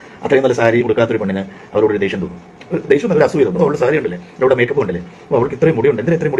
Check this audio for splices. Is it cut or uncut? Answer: uncut